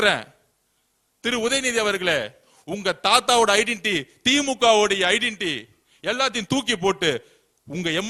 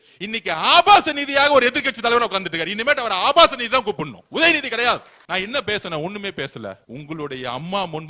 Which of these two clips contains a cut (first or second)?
second